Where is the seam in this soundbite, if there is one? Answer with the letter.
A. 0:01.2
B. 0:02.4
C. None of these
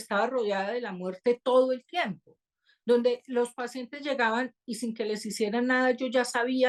C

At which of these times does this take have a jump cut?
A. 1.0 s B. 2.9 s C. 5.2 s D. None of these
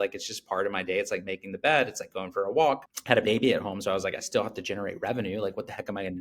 B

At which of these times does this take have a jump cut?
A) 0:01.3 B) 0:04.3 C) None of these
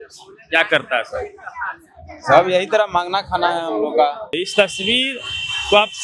B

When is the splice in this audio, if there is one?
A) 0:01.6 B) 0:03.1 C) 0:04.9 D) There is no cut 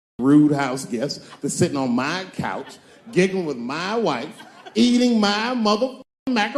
D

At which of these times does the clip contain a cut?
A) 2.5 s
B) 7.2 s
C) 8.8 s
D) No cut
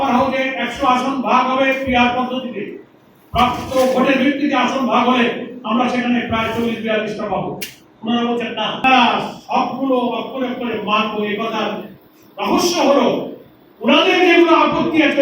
C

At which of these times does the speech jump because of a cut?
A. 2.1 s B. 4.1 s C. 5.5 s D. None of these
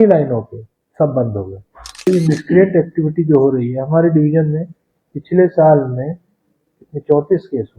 A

